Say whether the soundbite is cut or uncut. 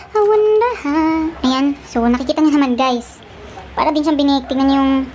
cut